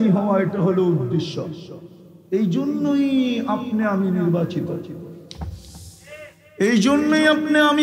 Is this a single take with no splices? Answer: yes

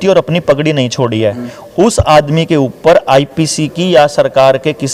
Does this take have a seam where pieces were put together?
no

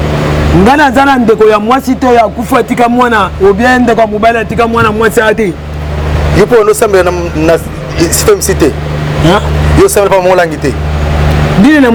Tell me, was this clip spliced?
no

